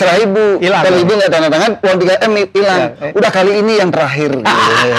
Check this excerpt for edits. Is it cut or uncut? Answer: uncut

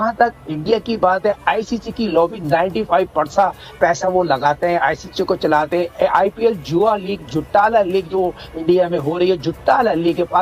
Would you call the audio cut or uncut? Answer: uncut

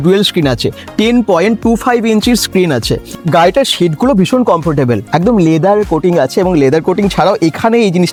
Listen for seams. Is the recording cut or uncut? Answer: uncut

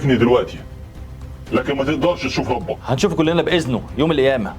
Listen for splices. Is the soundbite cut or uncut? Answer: uncut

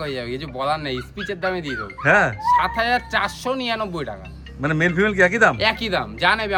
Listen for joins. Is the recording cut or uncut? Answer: uncut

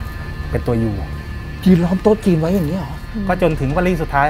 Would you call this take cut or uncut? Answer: cut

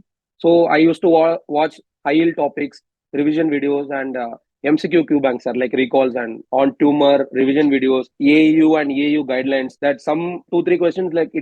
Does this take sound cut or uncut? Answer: cut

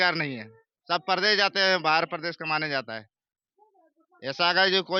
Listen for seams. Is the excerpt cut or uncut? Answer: uncut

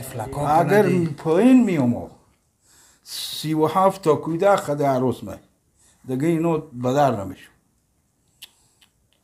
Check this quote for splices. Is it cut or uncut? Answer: uncut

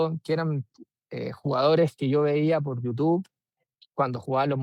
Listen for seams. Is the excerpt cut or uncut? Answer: uncut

